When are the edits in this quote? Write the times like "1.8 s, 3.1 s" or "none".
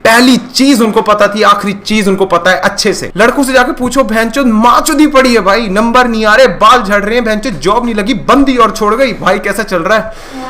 3.1 s